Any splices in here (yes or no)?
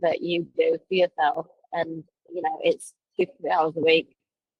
no